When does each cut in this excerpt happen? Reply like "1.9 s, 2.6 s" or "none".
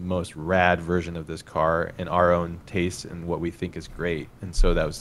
none